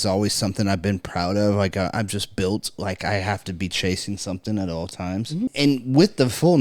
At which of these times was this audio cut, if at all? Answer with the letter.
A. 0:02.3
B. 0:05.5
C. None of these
B